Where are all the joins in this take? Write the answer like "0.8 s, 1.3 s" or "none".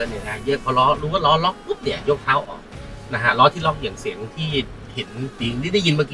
none